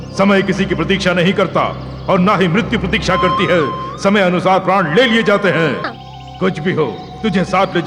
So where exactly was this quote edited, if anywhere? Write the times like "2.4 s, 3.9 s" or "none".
5.9 s

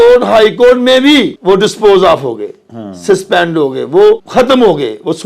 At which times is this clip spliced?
1.3 s, 4.2 s

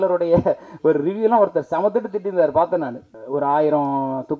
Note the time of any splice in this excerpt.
3.0 s

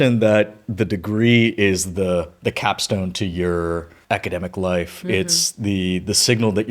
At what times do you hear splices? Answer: 3.9 s

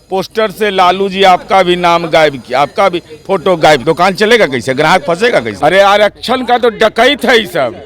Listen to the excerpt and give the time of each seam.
3.8 s, 5.5 s

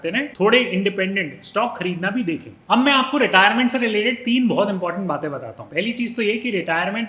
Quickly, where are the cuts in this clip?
2.5 s

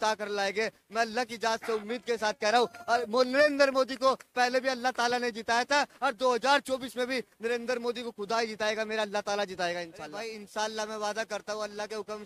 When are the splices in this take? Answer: 10.2 s

